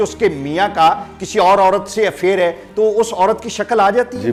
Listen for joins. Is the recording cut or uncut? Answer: uncut